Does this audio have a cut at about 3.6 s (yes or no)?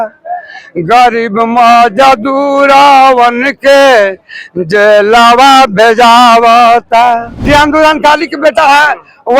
no